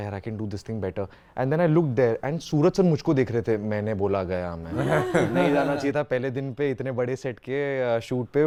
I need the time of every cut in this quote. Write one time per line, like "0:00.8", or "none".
none